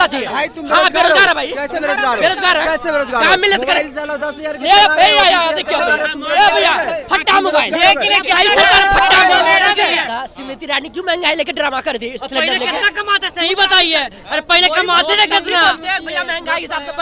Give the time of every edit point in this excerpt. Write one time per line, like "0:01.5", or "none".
0:10.1